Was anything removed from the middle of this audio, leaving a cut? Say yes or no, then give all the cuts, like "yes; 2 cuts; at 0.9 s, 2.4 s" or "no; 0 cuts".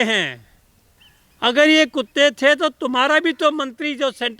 no; 0 cuts